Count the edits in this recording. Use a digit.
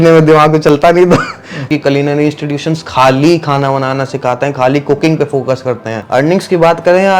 2